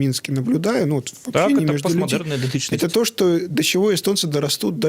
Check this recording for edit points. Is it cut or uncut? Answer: uncut